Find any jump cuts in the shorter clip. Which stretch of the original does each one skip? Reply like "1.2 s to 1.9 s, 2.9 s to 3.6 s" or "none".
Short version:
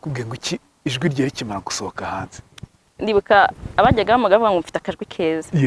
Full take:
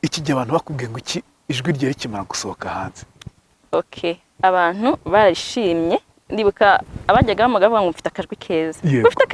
3.5 s to 6.2 s